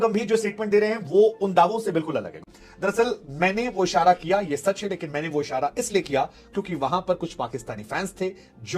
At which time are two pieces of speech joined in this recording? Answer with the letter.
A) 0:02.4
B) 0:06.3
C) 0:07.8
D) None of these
A